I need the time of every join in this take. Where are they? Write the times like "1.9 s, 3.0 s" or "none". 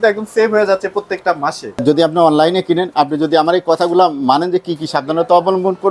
1.7 s